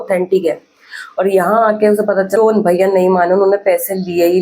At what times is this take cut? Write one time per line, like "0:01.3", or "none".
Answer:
0:02.4